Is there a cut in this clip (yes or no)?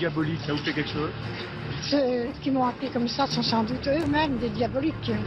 no